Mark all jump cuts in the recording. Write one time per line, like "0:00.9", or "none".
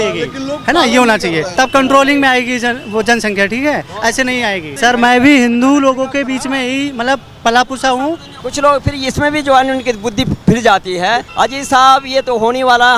0:01.5
0:04.7
0:08.3
0:11.3